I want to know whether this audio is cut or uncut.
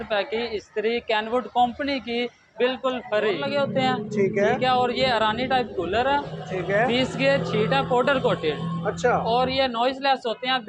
cut